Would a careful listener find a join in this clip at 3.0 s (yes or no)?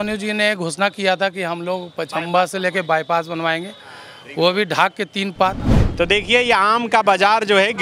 no